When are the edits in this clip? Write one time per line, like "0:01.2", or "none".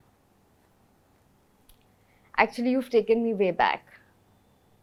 none